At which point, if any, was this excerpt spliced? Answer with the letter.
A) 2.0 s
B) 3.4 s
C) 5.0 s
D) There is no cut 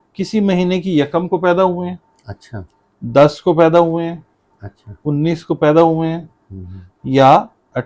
D